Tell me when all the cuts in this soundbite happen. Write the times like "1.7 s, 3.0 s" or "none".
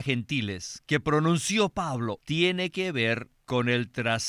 2.2 s, 3.3 s